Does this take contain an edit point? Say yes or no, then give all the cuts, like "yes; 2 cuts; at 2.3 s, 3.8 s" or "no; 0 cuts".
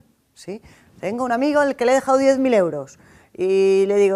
no; 0 cuts